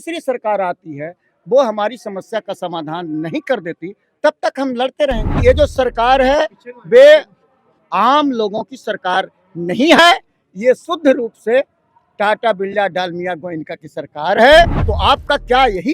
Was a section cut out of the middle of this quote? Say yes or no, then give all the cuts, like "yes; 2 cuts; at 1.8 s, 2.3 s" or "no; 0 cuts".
yes; 2 cuts; at 5.4 s, 14.8 s